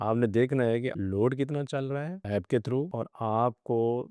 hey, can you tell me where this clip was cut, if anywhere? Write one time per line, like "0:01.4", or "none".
0:01.0
0:02.2
0:02.9